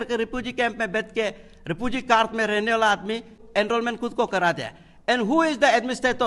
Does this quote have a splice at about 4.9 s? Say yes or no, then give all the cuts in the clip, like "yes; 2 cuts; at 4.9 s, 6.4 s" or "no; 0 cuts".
no; 1 cut; at 3.4 s